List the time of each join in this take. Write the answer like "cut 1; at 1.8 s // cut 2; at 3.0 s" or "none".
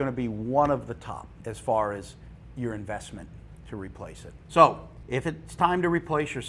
cut 1; at 4.3 s

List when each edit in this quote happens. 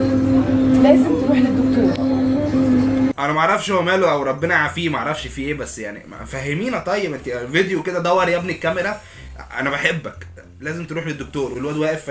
none

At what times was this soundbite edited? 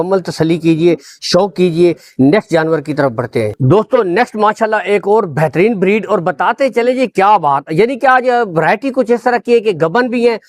none

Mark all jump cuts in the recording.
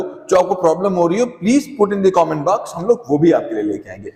none

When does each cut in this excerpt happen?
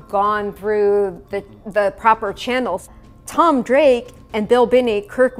cut 1; at 2.8 s

